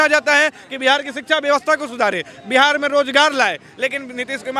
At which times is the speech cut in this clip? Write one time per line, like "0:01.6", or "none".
none